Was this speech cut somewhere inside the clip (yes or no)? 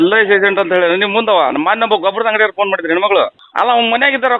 yes